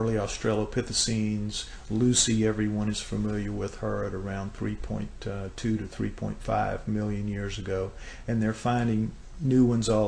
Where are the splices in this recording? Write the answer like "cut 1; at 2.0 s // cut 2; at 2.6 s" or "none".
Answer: cut 1; at 4.8 s